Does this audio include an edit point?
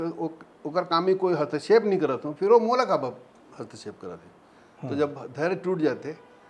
no; 0 cuts

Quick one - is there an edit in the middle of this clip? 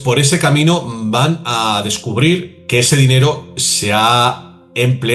yes; 1 cut; at 2.5 s

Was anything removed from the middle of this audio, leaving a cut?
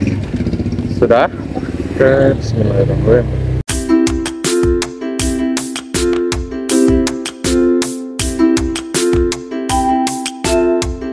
yes; 1 cut; at 3.7 s

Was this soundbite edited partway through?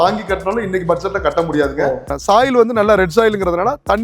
yes; 1 cut; at 2.1 s

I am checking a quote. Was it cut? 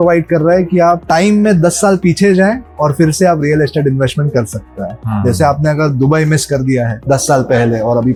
no; 0 cuts

